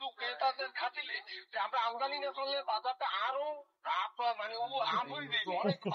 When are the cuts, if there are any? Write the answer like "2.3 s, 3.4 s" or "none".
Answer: none

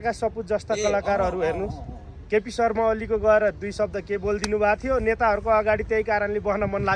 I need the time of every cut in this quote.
none

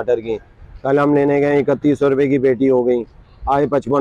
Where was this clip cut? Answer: none

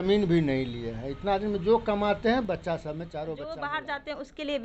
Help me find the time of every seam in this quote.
3.2 s

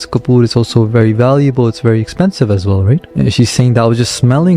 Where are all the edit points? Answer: 3.1 s

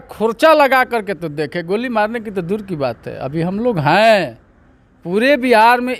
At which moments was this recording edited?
none

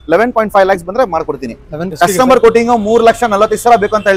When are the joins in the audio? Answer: 1.9 s

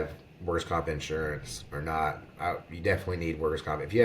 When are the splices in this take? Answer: 2.3 s

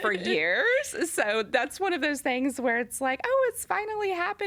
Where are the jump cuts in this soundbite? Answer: none

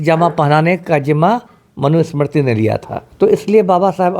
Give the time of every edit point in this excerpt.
3.0 s

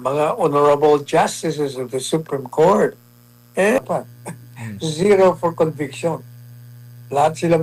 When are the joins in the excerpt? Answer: 3.8 s

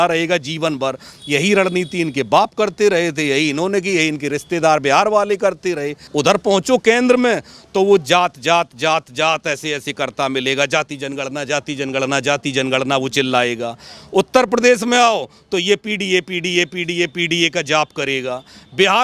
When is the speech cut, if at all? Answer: 6.1 s

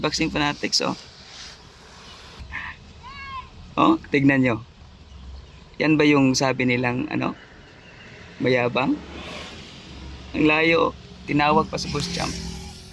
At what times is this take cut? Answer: 2.5 s

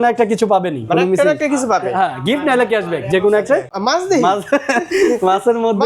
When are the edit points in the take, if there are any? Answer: 3.7 s

